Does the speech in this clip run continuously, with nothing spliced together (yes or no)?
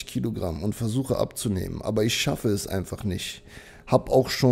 yes